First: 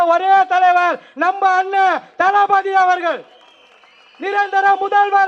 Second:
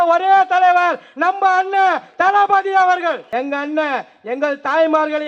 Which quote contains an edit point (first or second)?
second